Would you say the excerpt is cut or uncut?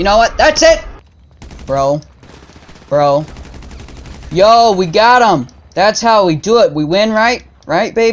cut